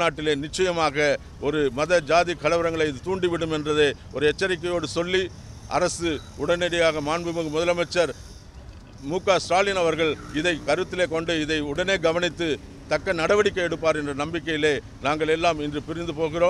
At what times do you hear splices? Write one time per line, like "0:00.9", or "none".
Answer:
none

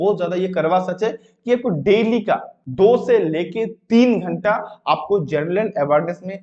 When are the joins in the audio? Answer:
0:02.6

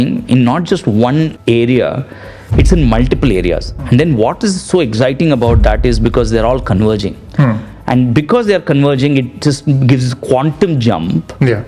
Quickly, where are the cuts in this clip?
0:01.4

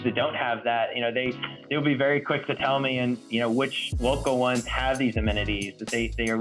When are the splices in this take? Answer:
none

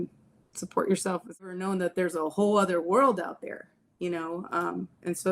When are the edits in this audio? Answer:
0:01.5

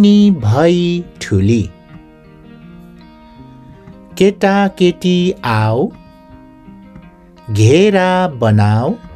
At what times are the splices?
0:01.7
0:03.8

